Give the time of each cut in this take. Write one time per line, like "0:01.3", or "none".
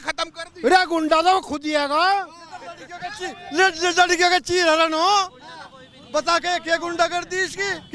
none